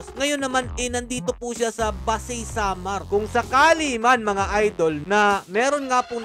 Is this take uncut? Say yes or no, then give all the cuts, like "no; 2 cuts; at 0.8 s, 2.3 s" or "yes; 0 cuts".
no; 1 cut; at 3.0 s